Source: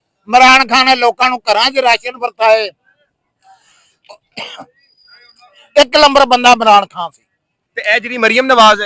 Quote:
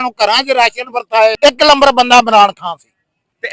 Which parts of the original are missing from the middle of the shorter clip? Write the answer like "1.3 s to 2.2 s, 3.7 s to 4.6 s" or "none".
2.6 s to 5.7 s